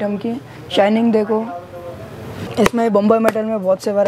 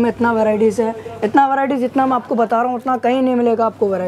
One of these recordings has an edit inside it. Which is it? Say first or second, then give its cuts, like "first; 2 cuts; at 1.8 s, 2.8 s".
first; 1 cut; at 2.5 s